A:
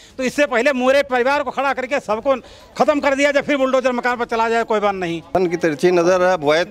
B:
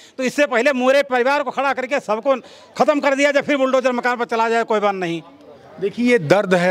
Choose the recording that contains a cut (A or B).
A